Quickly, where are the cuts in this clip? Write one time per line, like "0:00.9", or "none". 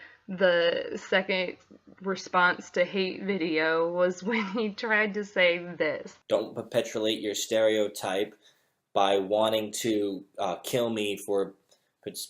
0:06.1